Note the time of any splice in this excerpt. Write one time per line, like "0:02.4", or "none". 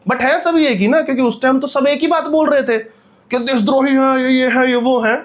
none